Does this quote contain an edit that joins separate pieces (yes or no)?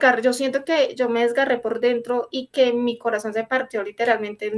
no